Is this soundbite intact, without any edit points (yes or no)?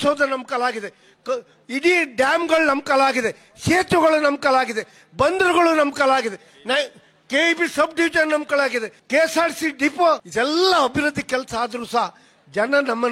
no